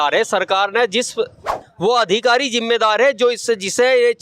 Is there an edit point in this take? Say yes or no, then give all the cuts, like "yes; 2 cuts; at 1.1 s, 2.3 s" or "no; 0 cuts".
yes; 1 cut; at 1.6 s